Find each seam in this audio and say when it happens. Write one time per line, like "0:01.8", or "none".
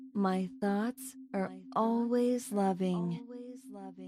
none

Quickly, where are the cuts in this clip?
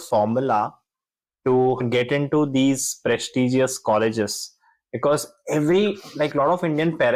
0:01.8

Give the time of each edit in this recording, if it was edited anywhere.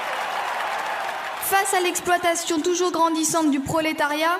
0:01.2

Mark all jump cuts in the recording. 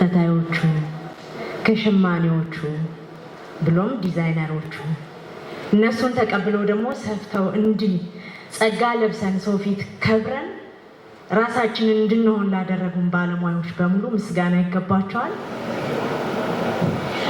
0:15.5

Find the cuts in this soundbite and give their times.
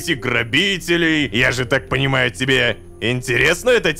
0:01.3

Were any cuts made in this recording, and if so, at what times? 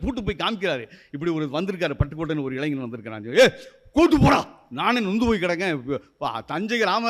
none

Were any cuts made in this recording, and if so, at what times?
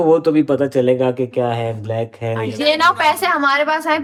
none

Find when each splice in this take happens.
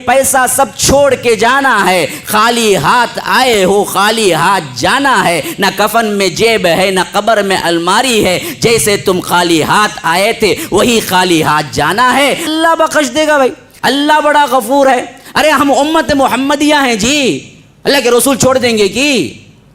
0:12.5
0:13.7

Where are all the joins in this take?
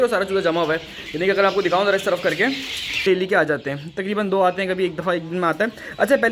0:03.0

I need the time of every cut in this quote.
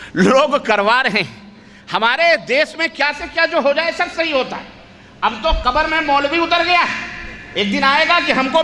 0:07.3

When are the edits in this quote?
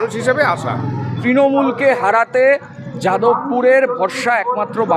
0:01.1

